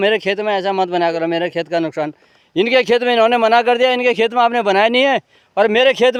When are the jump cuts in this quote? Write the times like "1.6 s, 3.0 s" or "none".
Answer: none